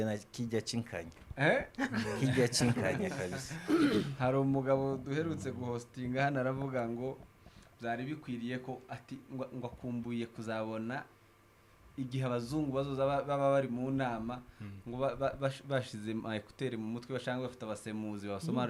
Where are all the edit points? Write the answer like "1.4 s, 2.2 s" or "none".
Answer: none